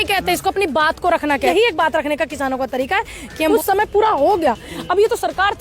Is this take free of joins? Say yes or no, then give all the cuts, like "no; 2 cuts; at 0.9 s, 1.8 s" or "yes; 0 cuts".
no; 2 cuts; at 1.5 s, 3.5 s